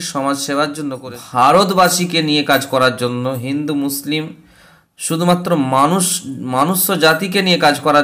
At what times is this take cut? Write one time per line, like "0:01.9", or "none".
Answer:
0:01.0